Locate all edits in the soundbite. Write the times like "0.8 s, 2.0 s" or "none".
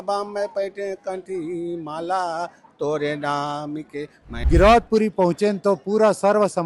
4.4 s